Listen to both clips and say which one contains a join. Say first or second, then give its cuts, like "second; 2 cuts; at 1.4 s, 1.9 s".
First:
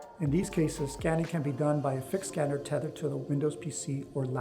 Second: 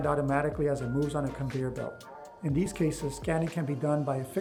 first; 1 cut; at 3.2 s